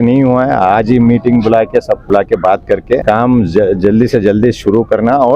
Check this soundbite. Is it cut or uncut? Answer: cut